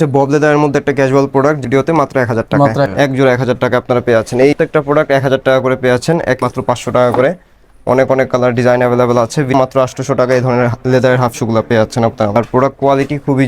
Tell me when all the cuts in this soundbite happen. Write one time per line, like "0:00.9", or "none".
0:01.6
0:02.9
0:04.5
0:06.4
0:09.5
0:12.4